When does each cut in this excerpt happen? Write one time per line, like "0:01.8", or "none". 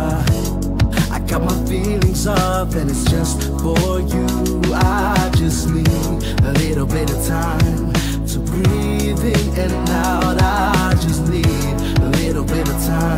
none